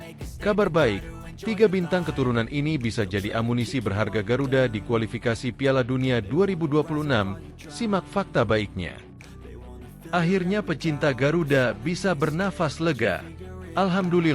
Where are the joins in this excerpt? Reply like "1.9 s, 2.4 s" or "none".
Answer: 9.4 s